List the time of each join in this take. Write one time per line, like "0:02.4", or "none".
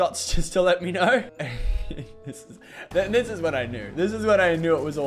0:01.3